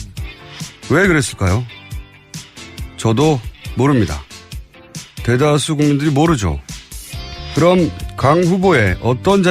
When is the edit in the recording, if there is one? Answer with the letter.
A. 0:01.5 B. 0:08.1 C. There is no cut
B